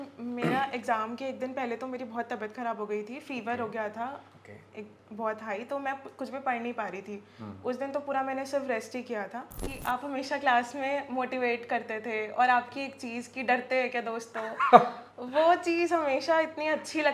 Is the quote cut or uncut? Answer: cut